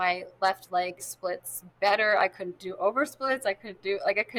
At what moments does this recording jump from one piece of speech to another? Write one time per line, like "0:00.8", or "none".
none